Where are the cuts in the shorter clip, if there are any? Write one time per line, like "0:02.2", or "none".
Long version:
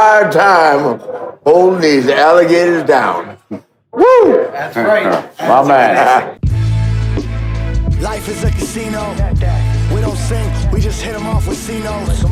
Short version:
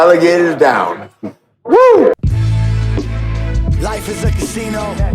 0:02.2